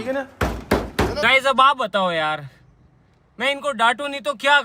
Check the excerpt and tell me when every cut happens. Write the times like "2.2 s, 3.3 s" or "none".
1.2 s